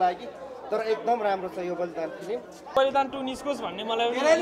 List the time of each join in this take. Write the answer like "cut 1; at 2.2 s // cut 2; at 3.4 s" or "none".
cut 1; at 2.7 s